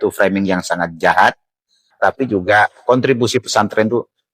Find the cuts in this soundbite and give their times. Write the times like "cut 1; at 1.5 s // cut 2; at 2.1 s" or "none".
cut 1; at 1.9 s